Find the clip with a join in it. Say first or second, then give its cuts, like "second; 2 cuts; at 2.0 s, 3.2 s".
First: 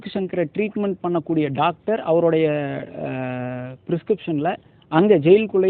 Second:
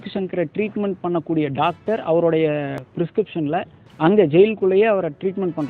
second; 1 cut; at 2.8 s